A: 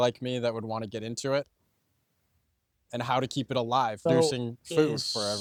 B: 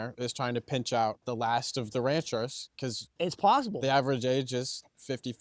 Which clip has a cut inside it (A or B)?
B